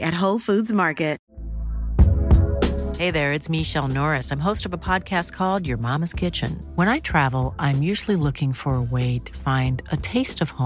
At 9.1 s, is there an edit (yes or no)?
no